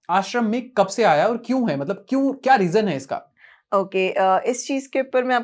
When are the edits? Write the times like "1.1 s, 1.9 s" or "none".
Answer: none